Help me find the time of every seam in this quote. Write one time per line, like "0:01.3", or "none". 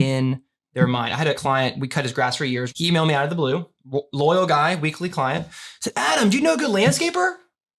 0:01.4
0:02.7